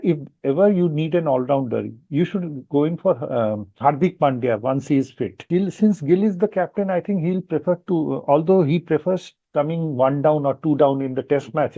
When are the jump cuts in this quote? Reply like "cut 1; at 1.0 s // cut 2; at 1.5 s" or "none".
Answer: cut 1; at 5.4 s